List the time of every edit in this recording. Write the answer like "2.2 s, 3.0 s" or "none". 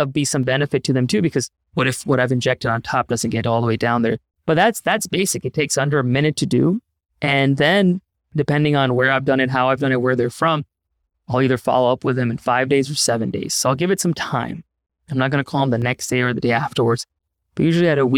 1.6 s